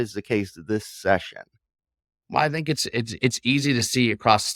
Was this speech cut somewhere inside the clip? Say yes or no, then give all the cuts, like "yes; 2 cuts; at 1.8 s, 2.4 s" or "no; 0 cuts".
no; 0 cuts